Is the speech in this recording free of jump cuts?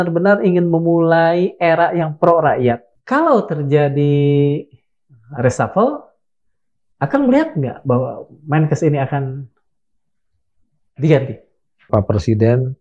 no; 2 cuts; at 2.9 s, 11.9 s

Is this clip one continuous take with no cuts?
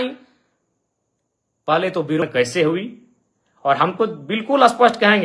no; 1 cut; at 2.2 s

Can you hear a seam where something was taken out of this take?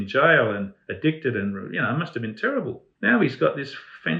yes; 1 cut; at 2.9 s

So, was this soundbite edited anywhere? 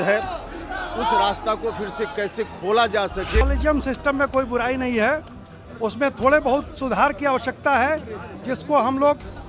yes; 1 cut; at 3.4 s

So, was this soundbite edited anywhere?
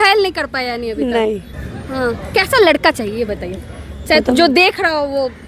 no; 0 cuts

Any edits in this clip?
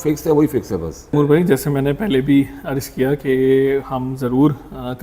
yes; 1 cut; at 1.1 s

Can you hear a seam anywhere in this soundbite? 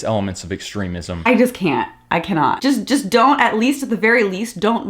yes; 2 cuts; at 1.1 s, 2.6 s

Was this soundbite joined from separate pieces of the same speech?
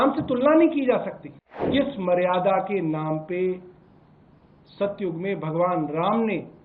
yes; 1 cut; at 1.7 s

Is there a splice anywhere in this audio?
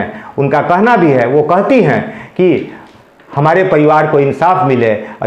no; 0 cuts

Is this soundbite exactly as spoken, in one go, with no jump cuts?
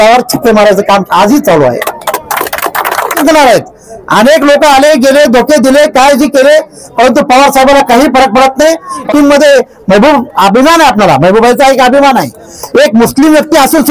no; 2 cuts; at 3.2 s, 9.1 s

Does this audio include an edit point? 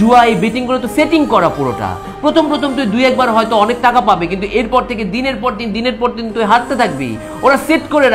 no; 0 cuts

